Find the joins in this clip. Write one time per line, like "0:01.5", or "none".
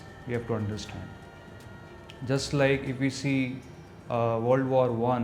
none